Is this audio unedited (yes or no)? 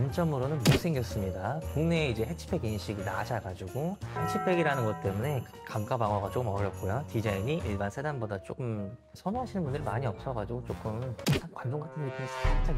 yes